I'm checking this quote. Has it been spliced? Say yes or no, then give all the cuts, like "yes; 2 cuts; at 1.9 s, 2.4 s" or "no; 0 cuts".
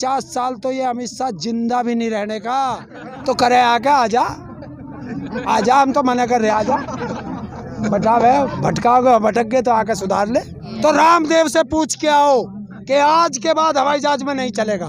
yes; 2 cuts; at 3.1 s, 10.7 s